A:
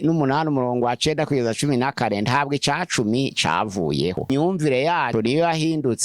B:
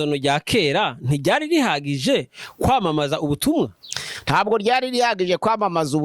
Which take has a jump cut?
A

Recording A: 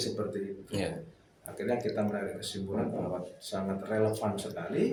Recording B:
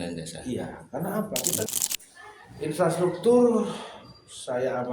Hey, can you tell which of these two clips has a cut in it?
B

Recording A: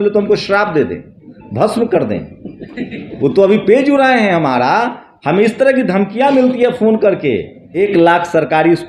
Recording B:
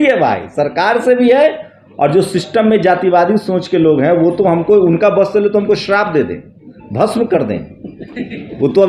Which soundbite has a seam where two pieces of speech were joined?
A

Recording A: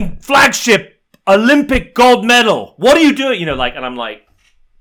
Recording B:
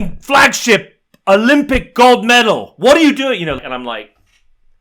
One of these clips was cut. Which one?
B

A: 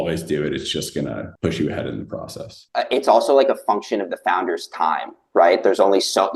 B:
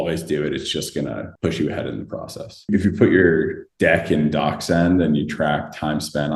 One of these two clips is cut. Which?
B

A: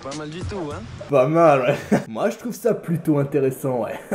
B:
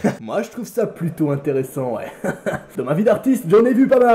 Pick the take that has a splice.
A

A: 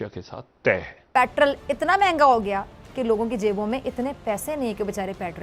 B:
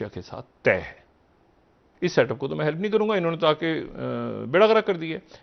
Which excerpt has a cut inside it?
A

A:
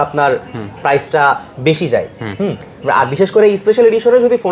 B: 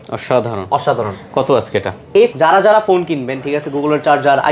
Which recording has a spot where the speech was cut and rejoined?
B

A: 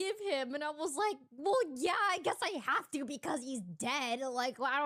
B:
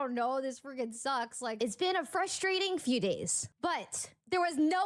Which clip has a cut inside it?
B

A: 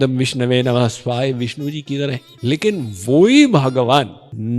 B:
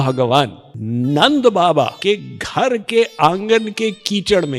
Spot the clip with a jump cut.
A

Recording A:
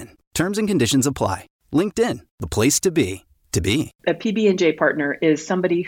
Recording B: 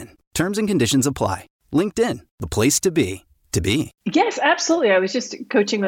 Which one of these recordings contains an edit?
A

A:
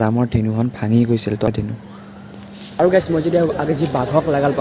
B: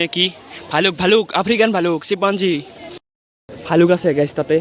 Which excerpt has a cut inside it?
A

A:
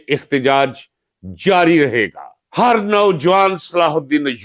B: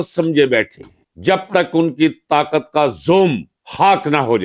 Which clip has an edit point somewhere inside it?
A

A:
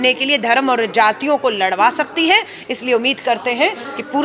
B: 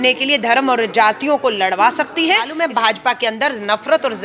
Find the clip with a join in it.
B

